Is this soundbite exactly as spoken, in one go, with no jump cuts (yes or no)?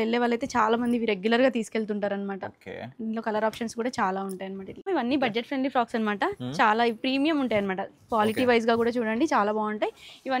no